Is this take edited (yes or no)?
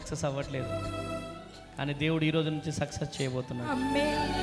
no